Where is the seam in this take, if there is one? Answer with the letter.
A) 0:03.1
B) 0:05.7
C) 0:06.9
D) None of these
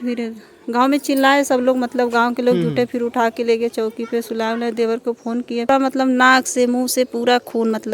B